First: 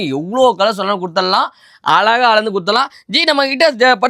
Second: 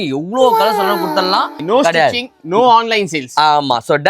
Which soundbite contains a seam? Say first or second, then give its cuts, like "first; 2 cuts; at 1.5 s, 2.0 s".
second; 1 cut; at 1.6 s